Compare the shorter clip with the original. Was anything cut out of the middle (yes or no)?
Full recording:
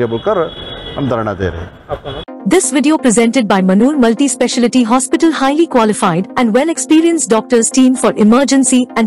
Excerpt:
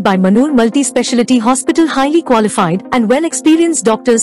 no